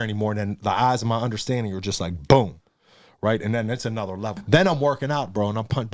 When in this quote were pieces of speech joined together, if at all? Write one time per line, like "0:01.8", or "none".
0:04.3